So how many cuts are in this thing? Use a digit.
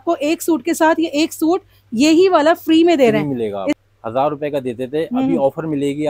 1